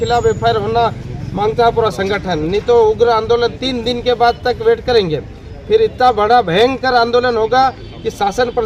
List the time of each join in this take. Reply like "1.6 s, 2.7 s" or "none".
none